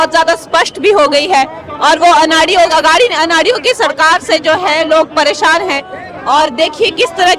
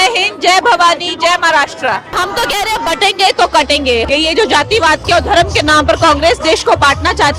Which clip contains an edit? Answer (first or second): second